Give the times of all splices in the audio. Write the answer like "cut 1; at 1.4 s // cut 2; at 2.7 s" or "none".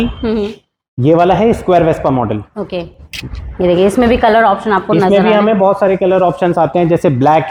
none